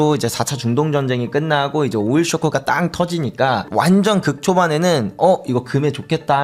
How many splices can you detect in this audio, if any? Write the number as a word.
zero